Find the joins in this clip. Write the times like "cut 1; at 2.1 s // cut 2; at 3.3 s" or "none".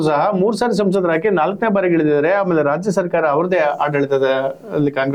none